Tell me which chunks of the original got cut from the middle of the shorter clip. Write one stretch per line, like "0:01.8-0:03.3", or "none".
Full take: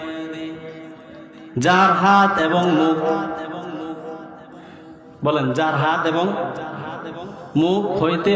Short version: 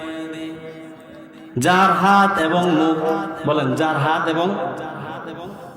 0:03.3-0:05.1